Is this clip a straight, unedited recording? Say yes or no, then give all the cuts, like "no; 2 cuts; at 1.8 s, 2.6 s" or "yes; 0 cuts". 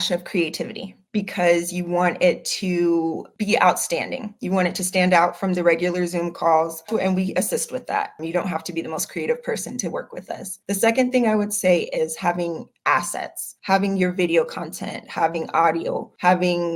no; 1 cut; at 6.9 s